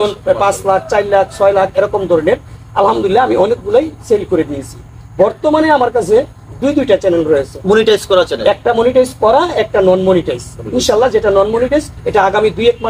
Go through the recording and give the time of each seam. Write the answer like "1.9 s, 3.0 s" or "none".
none